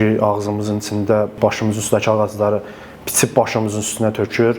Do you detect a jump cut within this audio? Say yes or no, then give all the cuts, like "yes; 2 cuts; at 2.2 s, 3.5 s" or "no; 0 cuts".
yes; 1 cut; at 1.4 s